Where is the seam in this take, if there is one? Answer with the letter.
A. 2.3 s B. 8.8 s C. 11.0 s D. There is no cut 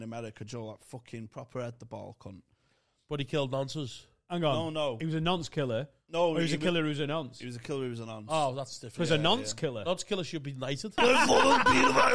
C